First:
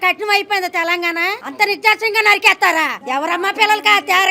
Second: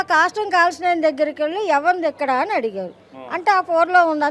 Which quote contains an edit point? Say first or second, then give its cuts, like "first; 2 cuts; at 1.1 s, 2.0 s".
first; 2 cuts; at 1.4 s, 3.0 s